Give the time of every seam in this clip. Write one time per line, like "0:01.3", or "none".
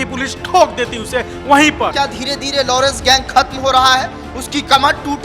0:01.9